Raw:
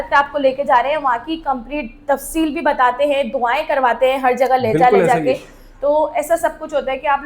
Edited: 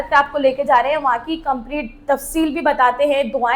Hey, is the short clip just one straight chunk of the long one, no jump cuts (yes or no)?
yes